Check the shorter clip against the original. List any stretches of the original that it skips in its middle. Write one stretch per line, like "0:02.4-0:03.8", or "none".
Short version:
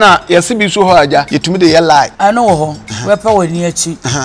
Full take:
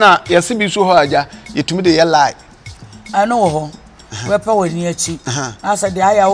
0:01.3-0:01.6
0:02.4-0:03.1
0:03.8-0:04.1